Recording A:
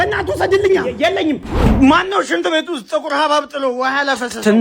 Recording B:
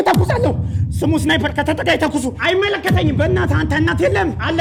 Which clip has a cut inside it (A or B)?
A